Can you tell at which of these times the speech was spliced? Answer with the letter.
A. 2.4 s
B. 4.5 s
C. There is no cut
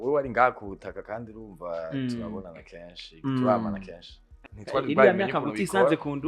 B